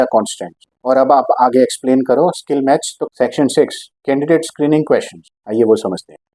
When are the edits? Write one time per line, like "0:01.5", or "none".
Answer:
0:03.0